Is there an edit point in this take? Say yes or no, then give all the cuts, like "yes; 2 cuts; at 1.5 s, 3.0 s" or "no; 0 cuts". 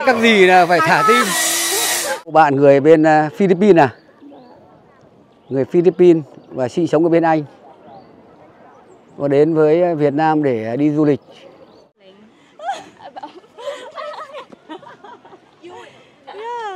yes; 2 cuts; at 2.3 s, 12.0 s